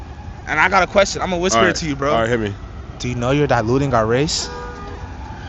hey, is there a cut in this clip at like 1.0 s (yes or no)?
no